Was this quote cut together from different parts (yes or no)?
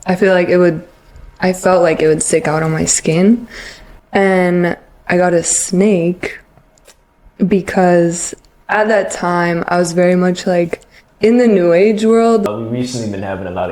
yes